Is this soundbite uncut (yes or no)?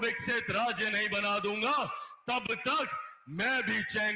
yes